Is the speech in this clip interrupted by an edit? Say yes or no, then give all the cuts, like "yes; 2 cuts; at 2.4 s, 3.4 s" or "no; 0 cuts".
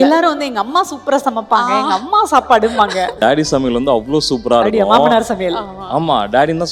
yes; 1 cut; at 3.2 s